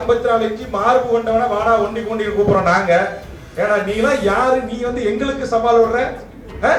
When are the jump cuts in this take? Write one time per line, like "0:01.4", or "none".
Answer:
none